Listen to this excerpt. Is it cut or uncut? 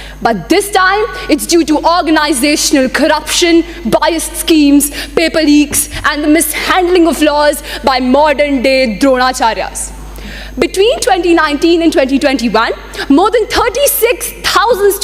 uncut